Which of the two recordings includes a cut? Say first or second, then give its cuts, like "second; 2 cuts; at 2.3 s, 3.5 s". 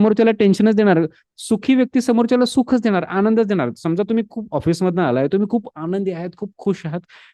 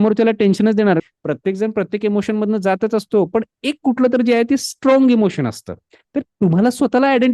second; 1 cut; at 1.1 s